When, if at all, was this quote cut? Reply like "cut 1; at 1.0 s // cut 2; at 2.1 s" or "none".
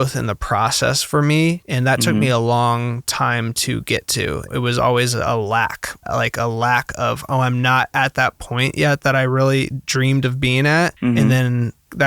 cut 1; at 1.7 s // cut 2; at 4.4 s // cut 3; at 6.0 s // cut 4; at 10.9 s